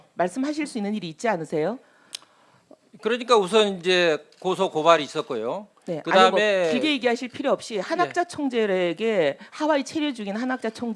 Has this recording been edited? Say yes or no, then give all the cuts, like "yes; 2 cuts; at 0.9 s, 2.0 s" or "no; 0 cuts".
no; 0 cuts